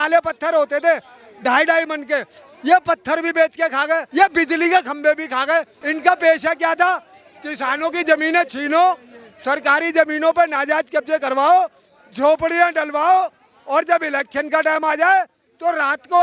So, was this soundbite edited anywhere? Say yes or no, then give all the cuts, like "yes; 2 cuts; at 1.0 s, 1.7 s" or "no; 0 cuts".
yes; 2 cuts; at 4.1 s, 5.8 s